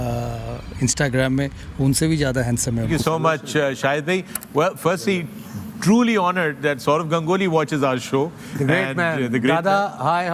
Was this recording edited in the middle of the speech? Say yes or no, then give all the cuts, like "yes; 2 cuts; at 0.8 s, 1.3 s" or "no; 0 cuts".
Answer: yes; 1 cut; at 2.9 s